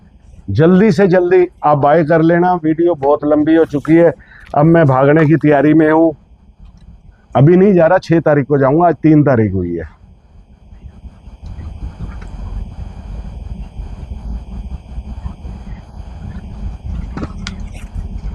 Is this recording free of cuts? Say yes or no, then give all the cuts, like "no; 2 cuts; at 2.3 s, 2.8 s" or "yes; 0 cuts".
yes; 0 cuts